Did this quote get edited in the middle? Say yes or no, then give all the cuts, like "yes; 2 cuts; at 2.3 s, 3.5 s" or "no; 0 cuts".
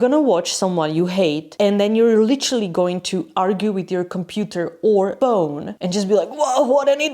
yes; 1 cut; at 5.4 s